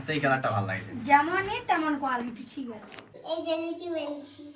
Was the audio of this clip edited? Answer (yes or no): yes